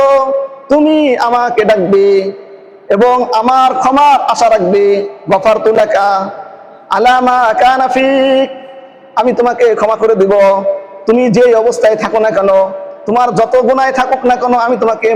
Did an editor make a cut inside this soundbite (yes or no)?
yes